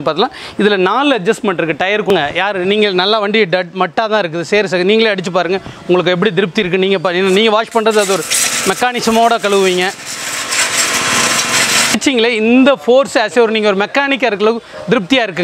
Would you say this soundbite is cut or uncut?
cut